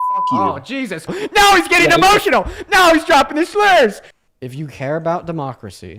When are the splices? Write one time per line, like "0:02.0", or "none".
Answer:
0:01.1
0:04.1